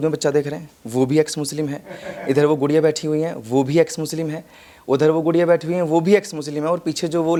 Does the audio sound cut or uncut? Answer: uncut